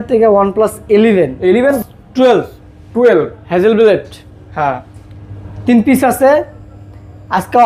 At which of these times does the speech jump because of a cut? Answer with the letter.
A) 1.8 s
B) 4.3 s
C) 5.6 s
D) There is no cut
A